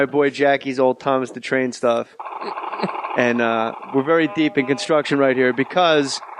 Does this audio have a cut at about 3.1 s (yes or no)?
yes